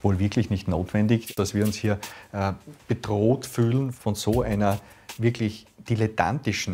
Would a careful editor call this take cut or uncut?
cut